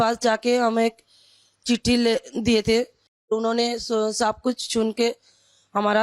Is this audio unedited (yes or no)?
no